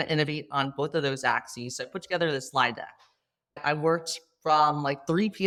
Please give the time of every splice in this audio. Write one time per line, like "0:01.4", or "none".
none